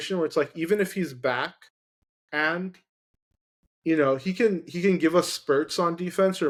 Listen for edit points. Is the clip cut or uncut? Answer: uncut